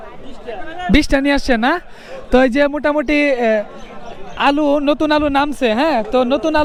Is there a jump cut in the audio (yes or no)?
no